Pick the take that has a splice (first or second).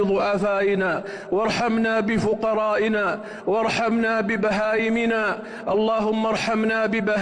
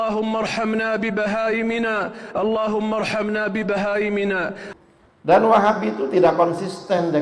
second